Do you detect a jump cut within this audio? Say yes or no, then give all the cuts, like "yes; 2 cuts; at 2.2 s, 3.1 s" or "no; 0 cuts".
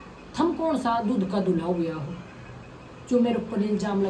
no; 0 cuts